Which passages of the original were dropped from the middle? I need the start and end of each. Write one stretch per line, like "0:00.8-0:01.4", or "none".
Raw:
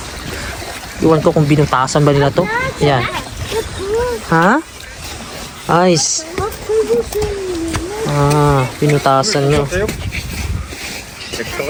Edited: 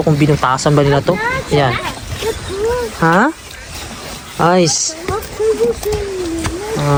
none